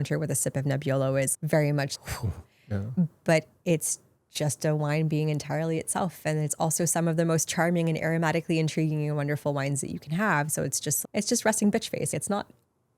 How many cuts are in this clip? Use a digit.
1